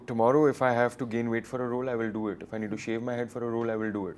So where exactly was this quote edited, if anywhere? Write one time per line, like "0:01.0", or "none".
none